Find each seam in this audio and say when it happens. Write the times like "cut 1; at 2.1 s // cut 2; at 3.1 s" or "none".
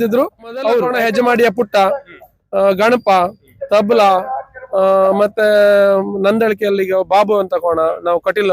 cut 1; at 0.9 s